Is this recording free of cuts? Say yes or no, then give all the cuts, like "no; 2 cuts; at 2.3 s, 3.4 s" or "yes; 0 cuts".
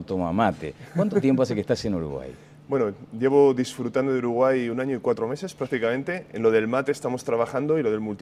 yes; 0 cuts